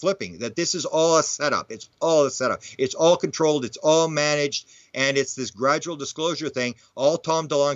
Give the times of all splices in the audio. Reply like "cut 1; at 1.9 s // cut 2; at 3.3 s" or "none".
cut 1; at 6.8 s